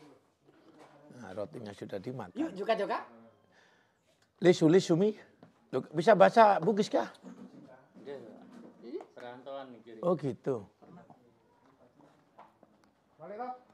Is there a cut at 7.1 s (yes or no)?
no